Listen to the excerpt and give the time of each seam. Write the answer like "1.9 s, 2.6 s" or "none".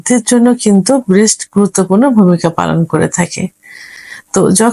none